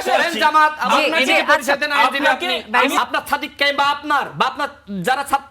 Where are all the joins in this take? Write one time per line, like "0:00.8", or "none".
0:02.9